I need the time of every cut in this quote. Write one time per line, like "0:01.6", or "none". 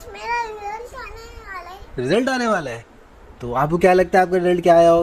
none